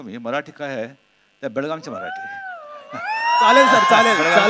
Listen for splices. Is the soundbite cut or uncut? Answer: uncut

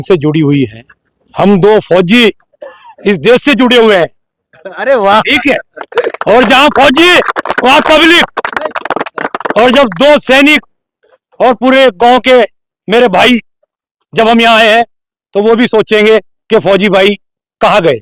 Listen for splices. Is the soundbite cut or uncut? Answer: uncut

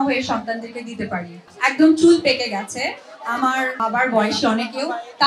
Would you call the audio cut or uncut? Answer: cut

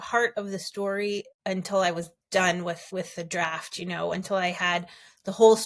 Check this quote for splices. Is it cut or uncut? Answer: cut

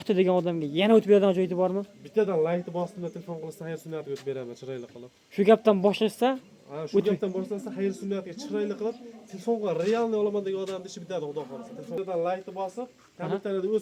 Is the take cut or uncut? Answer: cut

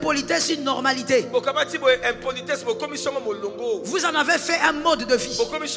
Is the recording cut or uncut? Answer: uncut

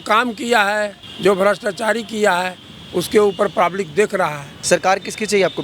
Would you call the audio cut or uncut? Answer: cut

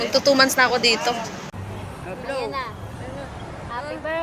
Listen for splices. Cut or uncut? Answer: cut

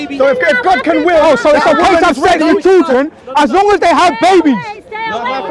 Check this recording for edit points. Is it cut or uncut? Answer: uncut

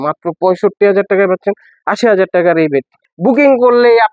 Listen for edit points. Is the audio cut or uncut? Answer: cut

